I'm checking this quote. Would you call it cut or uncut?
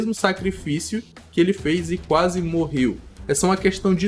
cut